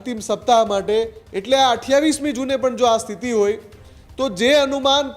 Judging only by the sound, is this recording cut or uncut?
cut